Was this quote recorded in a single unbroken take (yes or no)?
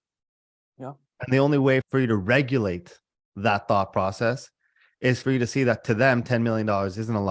no